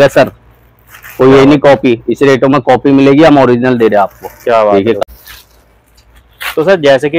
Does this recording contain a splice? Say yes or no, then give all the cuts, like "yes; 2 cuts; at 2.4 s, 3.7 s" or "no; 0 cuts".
yes; 1 cut; at 5.0 s